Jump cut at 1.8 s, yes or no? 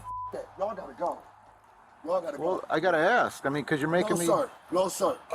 no